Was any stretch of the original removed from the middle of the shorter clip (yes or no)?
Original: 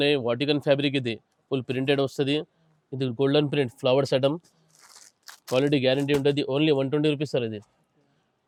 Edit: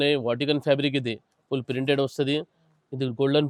no